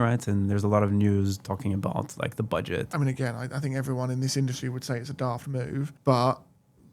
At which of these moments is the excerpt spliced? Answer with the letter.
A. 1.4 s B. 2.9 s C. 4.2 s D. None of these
B